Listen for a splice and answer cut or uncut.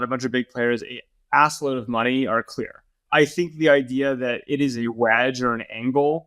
cut